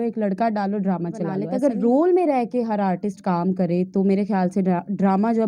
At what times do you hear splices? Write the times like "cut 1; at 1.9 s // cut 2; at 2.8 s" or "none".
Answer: cut 1; at 1.4 s

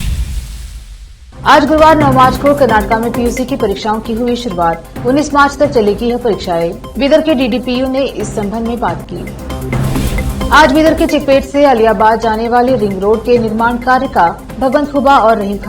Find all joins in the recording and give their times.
cut 1; at 1.2 s

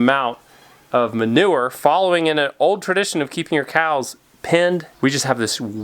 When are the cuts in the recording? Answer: cut 1; at 4.9 s

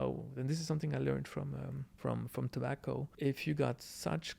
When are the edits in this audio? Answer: cut 1; at 1.8 s // cut 2; at 3.1 s

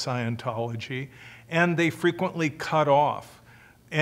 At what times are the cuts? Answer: cut 1; at 1.1 s

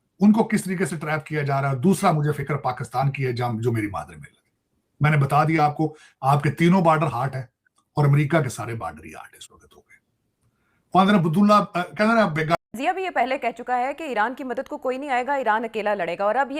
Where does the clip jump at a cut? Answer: cut 1; at 12.5 s

